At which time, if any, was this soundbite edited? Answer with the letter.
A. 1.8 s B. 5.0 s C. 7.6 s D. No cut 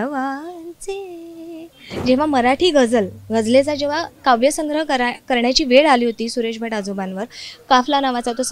A